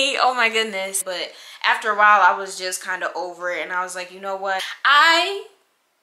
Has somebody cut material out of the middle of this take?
yes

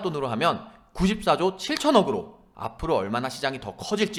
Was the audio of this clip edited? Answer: no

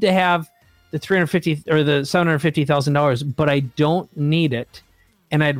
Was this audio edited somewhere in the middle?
no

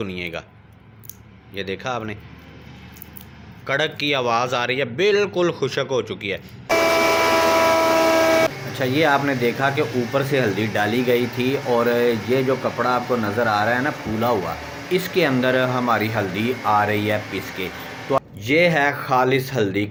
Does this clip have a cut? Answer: no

